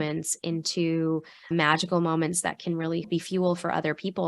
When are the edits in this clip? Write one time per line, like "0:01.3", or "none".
0:01.5
0:03.1